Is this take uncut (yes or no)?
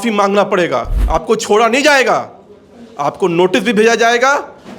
no